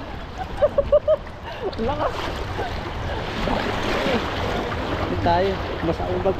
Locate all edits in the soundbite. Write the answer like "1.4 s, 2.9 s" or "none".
none